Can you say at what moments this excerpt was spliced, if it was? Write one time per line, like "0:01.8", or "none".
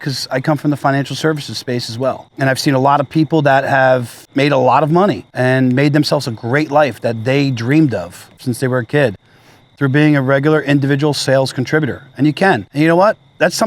0:02.3
0:04.2
0:05.3
0:08.4
0:12.7